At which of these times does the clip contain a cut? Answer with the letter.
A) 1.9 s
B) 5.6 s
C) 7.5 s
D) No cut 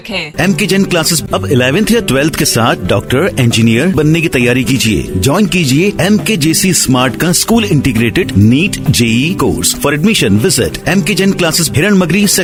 D